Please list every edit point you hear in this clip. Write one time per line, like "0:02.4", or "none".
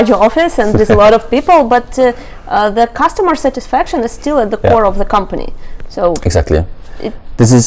none